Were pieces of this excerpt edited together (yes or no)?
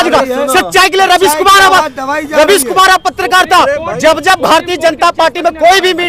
no